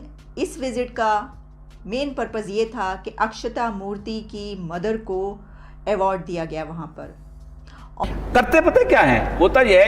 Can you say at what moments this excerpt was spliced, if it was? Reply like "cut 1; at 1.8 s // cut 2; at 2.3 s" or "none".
cut 1; at 8.0 s